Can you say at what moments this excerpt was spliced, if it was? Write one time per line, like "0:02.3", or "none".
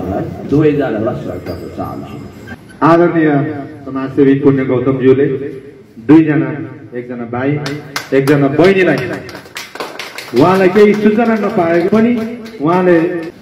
0:02.6
0:12.2